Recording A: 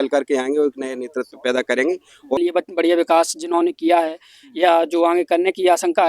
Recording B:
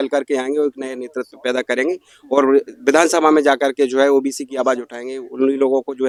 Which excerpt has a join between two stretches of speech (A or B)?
A